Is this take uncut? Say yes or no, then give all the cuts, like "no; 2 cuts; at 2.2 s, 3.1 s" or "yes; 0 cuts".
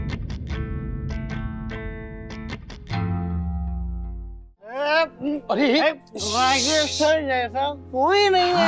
no; 1 cut; at 4.5 s